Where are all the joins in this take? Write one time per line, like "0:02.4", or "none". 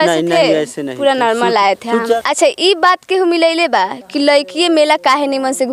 0:02.0